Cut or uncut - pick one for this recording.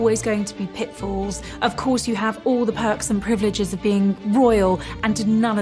uncut